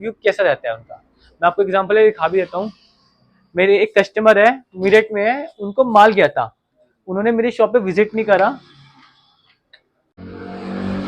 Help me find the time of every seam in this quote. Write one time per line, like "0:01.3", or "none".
0:10.2